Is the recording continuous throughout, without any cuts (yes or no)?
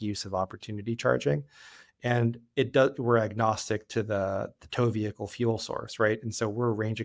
yes